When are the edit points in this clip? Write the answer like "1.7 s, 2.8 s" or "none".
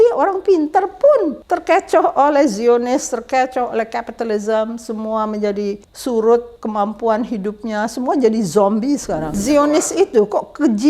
1.4 s, 5.9 s, 6.6 s, 9.4 s